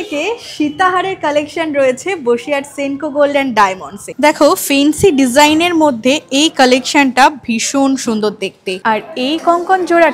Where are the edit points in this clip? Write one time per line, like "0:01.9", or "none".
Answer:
0:04.1
0:08.7